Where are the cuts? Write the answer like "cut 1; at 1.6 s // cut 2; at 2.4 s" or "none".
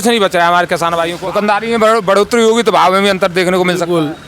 cut 1; at 1.1 s